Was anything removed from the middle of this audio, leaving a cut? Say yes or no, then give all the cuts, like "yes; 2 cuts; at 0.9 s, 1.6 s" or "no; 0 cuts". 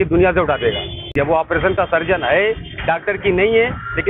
yes; 1 cut; at 1.1 s